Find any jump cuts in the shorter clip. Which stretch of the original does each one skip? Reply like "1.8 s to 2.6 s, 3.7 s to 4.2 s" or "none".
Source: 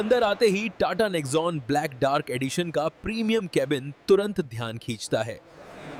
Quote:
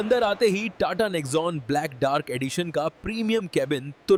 none

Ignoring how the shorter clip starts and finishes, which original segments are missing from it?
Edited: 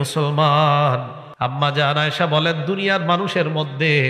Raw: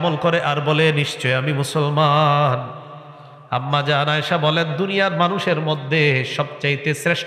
2.8 s to 3.3 s

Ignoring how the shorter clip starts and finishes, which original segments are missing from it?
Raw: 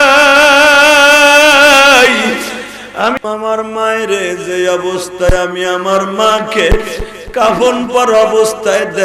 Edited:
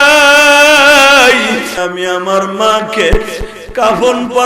2.5 s to 5.4 s

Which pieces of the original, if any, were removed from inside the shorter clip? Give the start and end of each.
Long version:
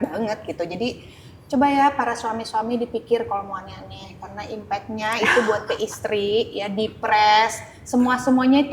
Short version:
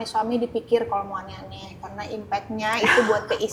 none

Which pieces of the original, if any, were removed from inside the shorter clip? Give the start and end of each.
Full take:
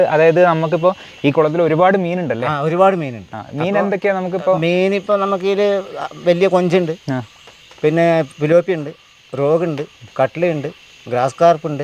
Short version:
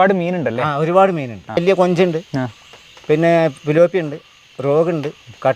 3.4 s to 6.3 s

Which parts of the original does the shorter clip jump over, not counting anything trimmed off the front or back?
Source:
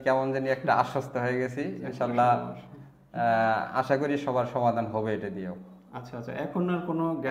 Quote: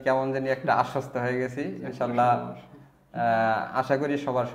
none

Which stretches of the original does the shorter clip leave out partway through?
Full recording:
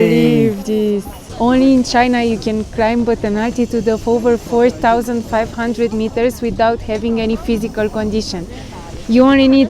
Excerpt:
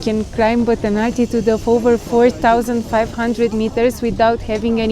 none

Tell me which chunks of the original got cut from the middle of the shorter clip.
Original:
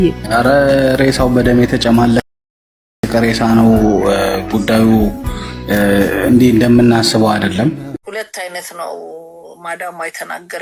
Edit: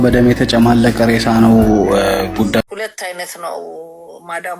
2.2 s to 3.1 s, 4.7 s to 8.0 s

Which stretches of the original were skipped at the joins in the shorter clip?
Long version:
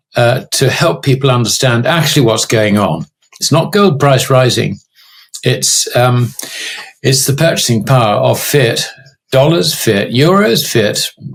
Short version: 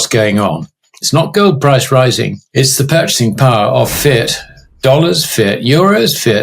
4.8 s to 6.9 s

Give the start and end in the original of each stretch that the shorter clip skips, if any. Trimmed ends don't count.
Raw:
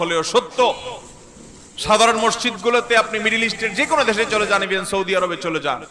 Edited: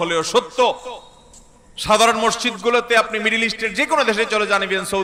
none

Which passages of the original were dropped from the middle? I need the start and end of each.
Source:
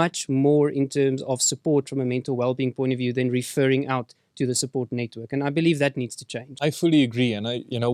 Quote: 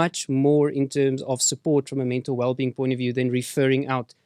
none

